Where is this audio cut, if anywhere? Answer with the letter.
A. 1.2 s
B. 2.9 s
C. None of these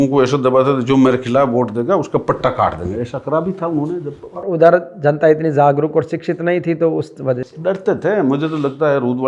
C